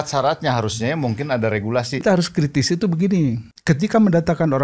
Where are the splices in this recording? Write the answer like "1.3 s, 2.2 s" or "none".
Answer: 2.0 s, 3.5 s